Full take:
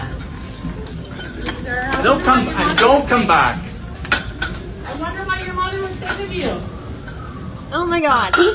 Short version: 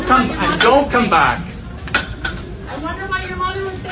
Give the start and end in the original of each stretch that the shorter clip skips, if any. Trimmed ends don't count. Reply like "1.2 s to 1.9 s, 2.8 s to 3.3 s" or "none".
none